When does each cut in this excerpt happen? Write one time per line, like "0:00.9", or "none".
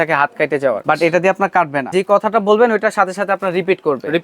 0:00.8
0:01.8